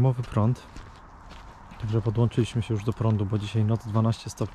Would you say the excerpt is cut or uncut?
uncut